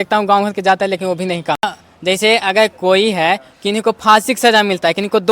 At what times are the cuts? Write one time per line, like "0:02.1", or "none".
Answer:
0:01.9